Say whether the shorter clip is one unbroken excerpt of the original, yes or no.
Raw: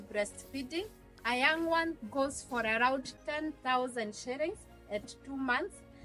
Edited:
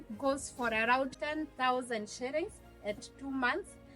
no